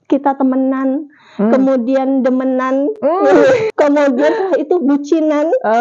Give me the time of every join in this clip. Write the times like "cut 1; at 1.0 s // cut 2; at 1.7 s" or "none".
cut 1; at 3.7 s